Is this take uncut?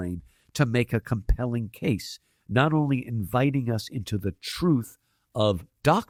yes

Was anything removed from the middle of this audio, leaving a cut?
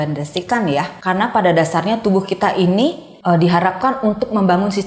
yes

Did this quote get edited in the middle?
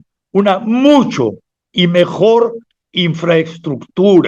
no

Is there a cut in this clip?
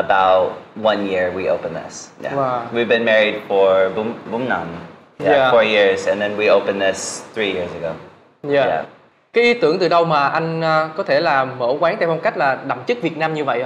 no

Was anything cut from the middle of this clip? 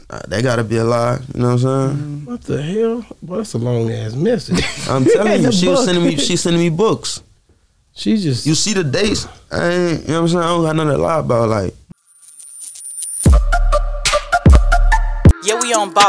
yes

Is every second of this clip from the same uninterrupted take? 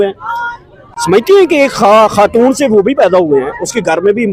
yes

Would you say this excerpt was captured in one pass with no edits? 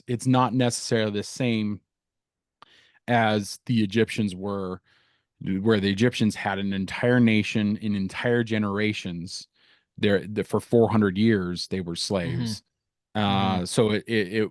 yes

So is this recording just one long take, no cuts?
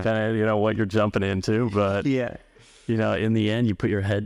yes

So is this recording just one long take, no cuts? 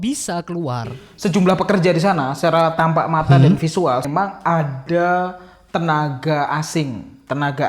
no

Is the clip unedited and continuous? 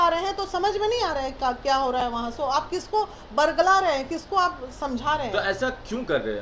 yes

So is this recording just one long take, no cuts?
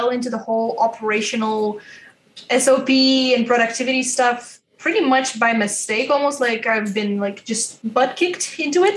no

